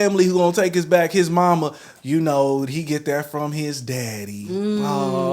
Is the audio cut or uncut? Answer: uncut